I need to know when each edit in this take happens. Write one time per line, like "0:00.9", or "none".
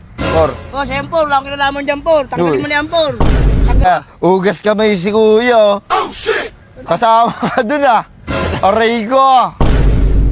0:03.8